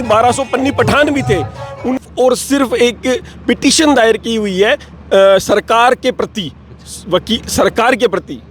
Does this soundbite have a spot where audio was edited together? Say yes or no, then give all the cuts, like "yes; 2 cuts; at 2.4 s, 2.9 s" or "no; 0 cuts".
yes; 1 cut; at 2.0 s